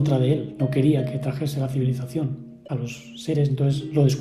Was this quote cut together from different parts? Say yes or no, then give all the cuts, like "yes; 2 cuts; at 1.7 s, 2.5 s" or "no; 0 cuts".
no; 0 cuts